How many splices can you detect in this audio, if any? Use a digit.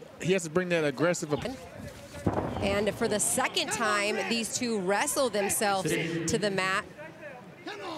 1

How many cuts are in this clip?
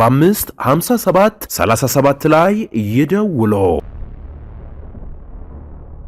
1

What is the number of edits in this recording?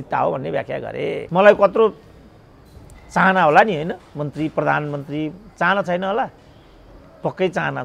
1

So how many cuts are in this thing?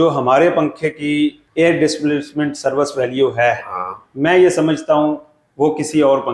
1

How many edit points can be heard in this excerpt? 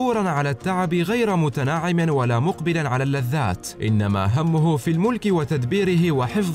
0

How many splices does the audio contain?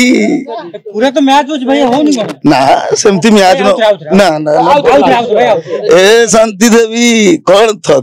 0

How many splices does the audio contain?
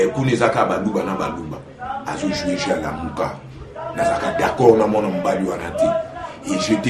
0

